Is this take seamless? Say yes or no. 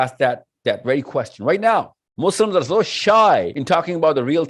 no